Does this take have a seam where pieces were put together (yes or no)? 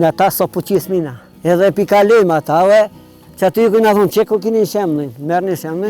yes